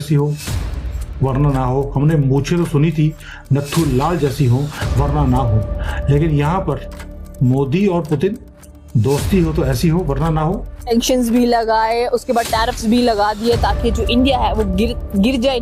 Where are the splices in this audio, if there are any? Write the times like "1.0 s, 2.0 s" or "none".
10.9 s